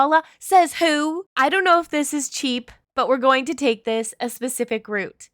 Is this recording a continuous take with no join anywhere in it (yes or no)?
no